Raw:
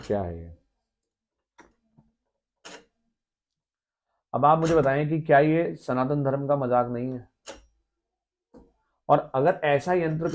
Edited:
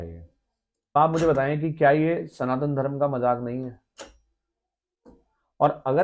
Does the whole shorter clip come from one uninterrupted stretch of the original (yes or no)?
no